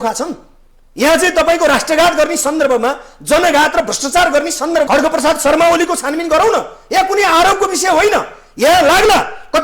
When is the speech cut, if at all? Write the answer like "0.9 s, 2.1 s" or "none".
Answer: 4.9 s